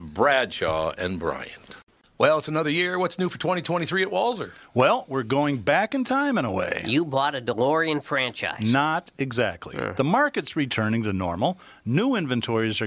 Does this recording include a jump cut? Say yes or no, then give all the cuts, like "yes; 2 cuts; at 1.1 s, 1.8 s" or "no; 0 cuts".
yes; 1 cut; at 1.9 s